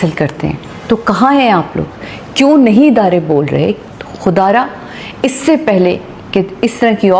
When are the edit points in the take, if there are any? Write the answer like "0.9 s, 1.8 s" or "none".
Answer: 3.8 s